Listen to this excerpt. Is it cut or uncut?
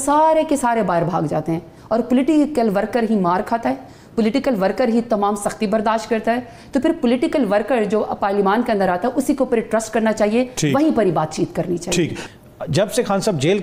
uncut